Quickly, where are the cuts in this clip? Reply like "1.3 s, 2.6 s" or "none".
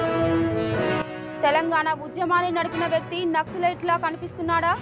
1.1 s